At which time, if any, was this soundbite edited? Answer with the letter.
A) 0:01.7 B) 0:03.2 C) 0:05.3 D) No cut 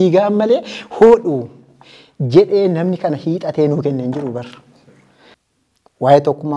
C